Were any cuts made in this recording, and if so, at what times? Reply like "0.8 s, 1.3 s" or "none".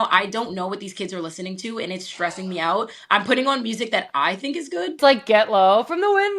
5.0 s